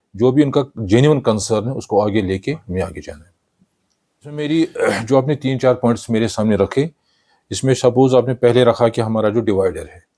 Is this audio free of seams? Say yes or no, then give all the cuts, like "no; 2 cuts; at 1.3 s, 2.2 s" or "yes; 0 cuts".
no; 1 cut; at 4.4 s